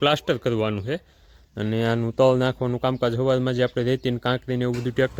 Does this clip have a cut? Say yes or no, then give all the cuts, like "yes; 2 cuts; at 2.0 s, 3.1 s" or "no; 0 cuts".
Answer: no; 0 cuts